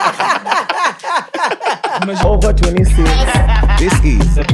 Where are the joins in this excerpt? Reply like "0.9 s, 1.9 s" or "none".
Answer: 2.2 s

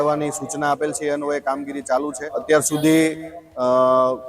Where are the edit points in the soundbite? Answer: 2.4 s

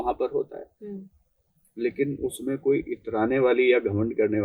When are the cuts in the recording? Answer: none

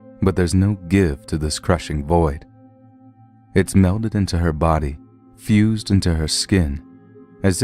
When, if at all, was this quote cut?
3.3 s

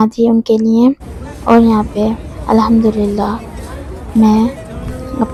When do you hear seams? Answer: none

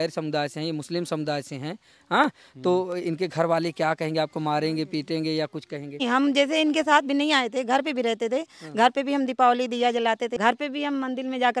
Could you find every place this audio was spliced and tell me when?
6.0 s, 10.3 s

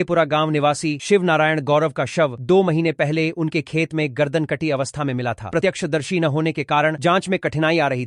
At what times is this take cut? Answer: none

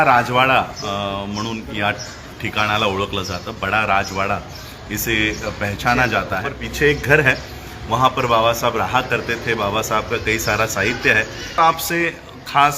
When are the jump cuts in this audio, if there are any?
6.6 s, 11.6 s

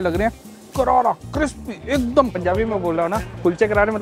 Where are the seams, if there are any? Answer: 2.4 s

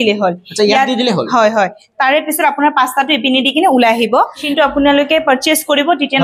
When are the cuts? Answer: 4.4 s

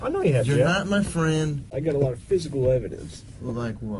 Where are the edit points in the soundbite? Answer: 1.7 s

